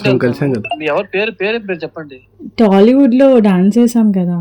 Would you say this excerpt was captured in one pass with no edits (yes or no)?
yes